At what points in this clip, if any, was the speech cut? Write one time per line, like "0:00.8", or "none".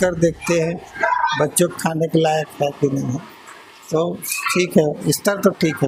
none